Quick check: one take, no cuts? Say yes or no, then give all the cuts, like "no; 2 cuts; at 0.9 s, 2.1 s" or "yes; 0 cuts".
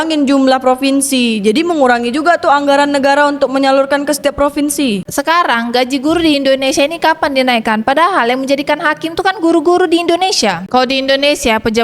no; 2 cuts; at 5.0 s, 10.7 s